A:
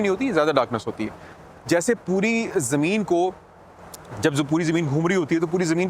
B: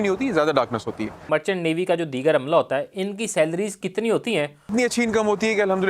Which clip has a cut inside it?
B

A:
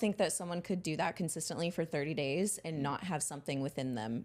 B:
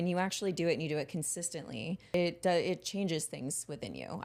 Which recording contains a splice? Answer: B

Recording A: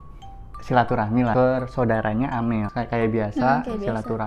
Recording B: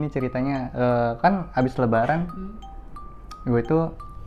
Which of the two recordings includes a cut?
A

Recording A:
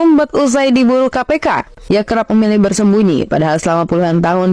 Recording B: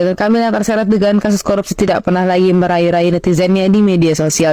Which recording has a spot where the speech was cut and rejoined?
A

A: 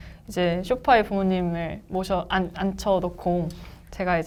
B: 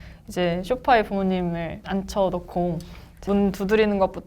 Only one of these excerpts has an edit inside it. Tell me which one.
B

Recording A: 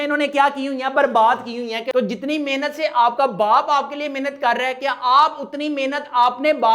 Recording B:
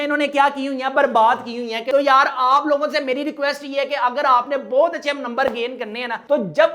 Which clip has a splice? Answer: A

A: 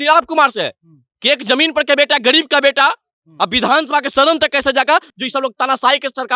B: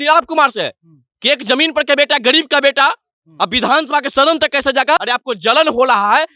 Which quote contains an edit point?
B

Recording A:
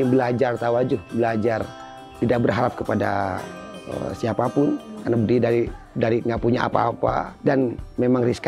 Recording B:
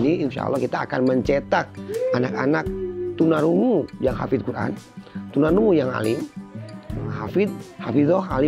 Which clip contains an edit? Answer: A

